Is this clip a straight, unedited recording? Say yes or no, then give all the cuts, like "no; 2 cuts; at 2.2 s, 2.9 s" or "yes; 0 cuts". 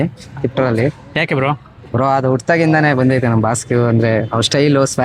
no; 1 cut; at 1.4 s